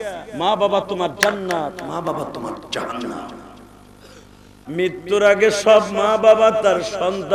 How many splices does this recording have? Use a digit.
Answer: 1